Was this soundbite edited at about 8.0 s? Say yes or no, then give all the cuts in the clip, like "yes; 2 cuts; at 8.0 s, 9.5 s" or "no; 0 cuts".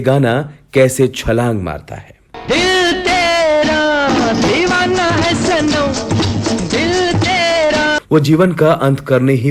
yes; 1 cut; at 8.0 s